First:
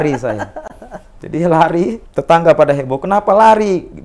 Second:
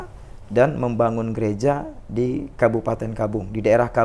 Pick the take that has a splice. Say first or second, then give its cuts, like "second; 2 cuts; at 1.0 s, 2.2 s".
first; 1 cut; at 2.0 s